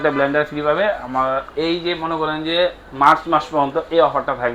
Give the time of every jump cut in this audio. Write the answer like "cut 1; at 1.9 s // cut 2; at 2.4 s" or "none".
none

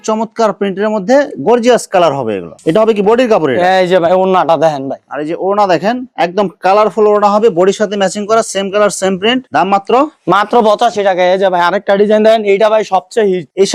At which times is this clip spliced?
none

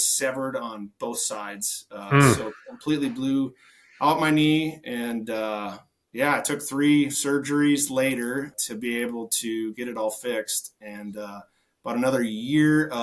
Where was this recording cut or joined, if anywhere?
cut 1; at 8.6 s

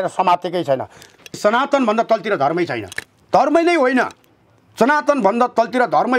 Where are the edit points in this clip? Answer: cut 1; at 1.3 s

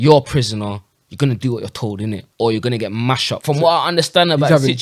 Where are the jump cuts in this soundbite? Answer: cut 1; at 3.3 s

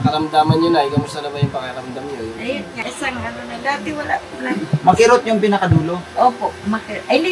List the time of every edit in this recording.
cut 1; at 2.7 s

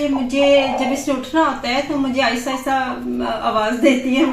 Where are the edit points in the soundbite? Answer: none

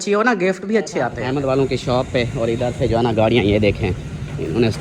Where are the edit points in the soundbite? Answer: cut 1; at 1.2 s

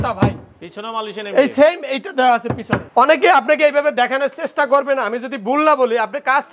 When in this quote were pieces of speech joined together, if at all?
cut 1; at 2.8 s

